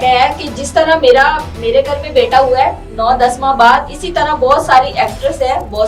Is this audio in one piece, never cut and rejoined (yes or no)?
yes